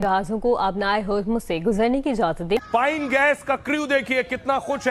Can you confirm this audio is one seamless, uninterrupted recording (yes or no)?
no